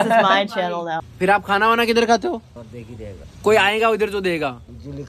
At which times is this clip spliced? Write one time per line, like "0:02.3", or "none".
0:01.0